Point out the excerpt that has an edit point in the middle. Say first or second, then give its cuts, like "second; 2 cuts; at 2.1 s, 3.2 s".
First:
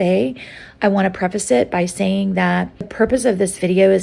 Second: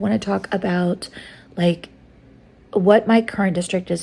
first; 1 cut; at 2.8 s